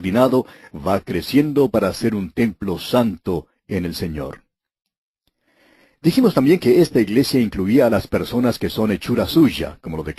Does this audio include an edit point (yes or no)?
yes